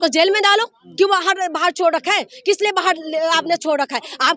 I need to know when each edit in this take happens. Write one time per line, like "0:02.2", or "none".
none